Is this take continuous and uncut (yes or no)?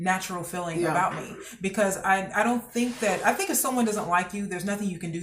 yes